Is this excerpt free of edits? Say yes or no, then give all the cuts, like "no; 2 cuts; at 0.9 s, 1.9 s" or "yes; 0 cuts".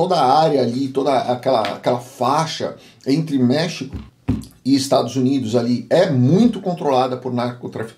yes; 0 cuts